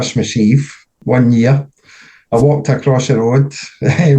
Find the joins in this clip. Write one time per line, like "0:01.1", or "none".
0:00.9